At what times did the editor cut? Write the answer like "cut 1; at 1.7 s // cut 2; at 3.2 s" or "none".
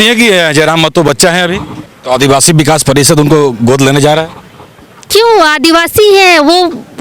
cut 1; at 1.9 s